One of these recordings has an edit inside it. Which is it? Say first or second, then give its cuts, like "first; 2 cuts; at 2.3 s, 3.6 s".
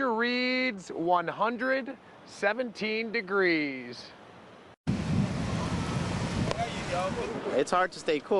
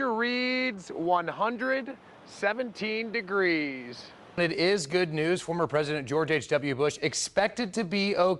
second; 1 cut; at 4.4 s